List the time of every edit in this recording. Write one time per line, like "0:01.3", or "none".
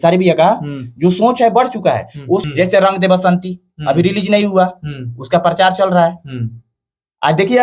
0:02.4

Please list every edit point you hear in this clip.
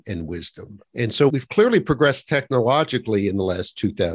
0:01.3

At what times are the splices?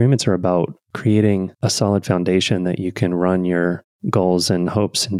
0:03.9

